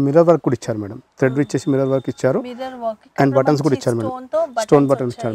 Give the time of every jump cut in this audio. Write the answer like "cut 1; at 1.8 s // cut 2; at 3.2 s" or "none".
none